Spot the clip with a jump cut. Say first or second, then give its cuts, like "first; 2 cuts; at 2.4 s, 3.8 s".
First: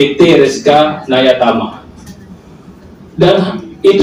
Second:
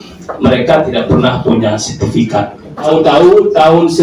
second; 1 cut; at 2.9 s